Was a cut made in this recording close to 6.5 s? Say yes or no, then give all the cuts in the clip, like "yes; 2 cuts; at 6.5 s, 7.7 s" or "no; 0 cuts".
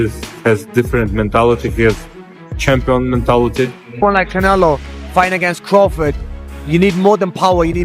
no; 1 cut; at 4.0 s